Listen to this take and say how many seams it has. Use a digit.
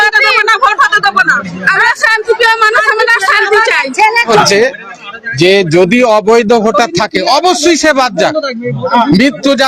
1